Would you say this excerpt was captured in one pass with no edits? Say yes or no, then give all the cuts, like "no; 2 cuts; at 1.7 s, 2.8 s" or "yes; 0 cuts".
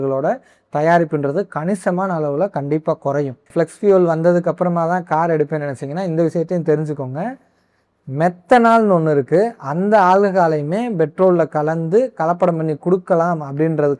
no; 1 cut; at 3.5 s